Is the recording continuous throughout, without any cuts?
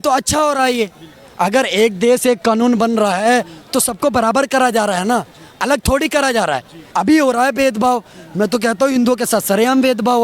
no; 1 cut; at 6.8 s

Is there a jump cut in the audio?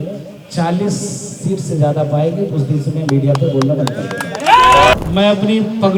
yes; 1 cut; at 4.9 s

